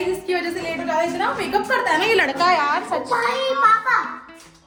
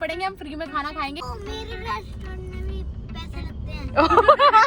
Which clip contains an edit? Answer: second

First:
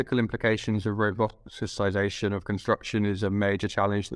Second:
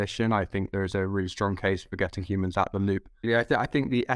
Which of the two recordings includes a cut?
second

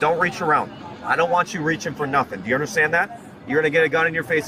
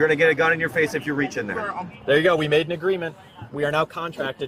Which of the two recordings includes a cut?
second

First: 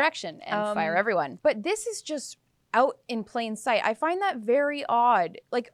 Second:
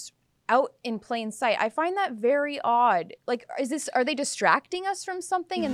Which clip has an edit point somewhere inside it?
first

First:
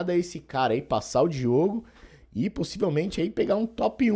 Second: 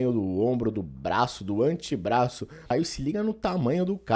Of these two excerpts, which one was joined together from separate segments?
second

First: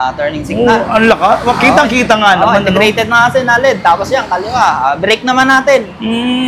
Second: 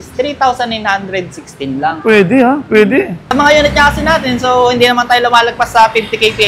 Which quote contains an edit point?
second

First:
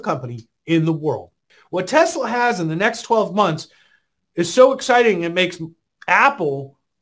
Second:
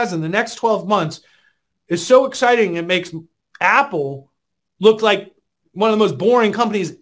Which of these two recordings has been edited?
first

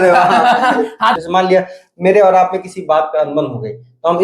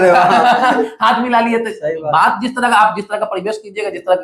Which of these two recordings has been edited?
first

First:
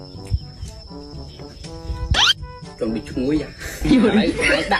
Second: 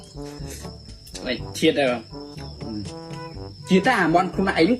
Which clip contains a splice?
second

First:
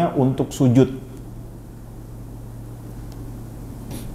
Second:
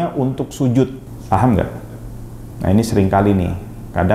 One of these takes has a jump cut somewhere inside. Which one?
second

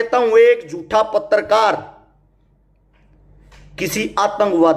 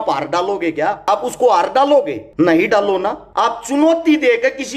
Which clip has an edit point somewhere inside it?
second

